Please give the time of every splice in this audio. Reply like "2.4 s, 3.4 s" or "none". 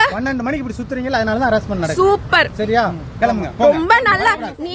none